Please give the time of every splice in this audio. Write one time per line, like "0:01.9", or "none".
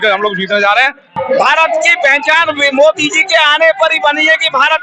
0:01.2